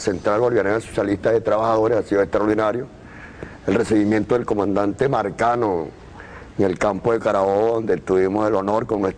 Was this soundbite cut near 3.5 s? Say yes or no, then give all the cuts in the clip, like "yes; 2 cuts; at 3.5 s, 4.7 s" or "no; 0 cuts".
no; 1 cut; at 2.0 s